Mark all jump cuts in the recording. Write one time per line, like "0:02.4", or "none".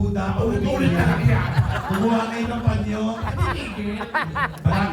none